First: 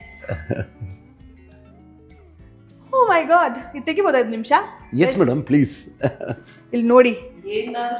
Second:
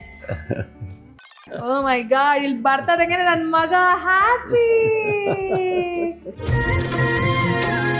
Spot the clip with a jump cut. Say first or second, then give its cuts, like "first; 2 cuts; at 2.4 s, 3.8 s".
second; 1 cut; at 1.5 s